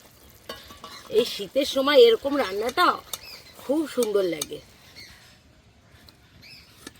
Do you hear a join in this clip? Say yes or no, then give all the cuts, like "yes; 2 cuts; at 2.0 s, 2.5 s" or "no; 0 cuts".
yes; 1 cut; at 4.9 s